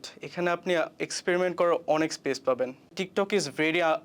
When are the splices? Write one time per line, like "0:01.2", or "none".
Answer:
0:02.9

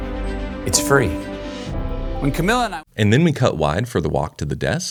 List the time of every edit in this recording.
none

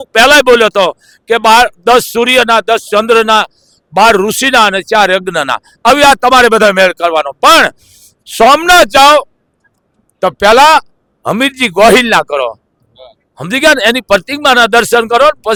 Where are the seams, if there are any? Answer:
none

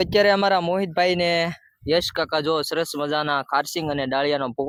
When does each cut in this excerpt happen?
none

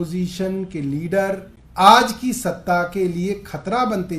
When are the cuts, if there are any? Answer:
0:01.6

